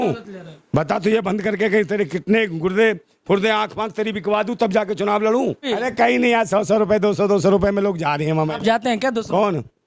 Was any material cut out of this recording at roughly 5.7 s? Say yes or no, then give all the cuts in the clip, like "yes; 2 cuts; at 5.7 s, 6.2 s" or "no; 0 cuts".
yes; 1 cut; at 5.7 s